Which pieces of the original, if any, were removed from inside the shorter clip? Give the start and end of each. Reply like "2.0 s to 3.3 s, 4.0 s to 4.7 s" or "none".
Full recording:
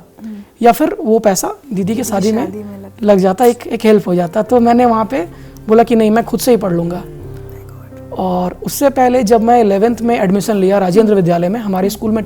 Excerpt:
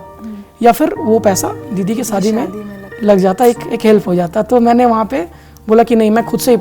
none

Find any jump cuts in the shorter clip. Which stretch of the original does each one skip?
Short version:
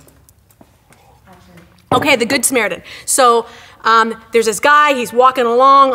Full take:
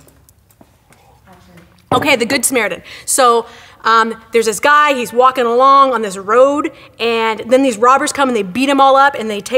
none

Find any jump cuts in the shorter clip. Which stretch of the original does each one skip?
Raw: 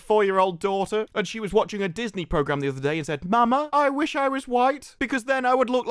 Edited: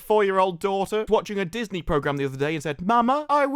1.1 s to 1.5 s

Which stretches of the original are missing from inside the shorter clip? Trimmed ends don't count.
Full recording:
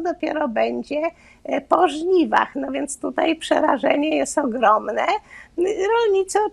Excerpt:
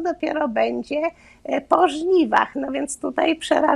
none

